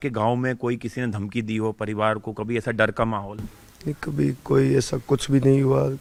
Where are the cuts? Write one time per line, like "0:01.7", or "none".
none